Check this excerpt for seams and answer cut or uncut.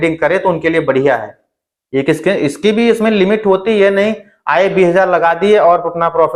uncut